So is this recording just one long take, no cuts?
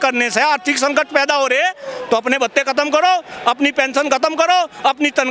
yes; 0 cuts

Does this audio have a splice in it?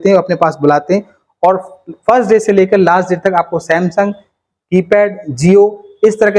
no; 0 cuts

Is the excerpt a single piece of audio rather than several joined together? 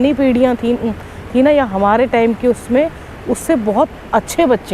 yes; 0 cuts

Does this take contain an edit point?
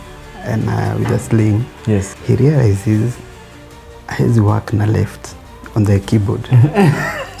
yes; 1 cut; at 2.1 s

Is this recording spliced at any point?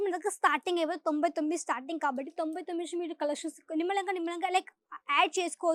no; 0 cuts

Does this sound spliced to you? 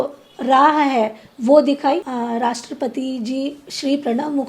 yes; 1 cut; at 2.1 s

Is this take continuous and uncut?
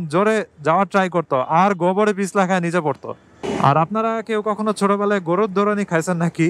no; 1 cut; at 3.3 s

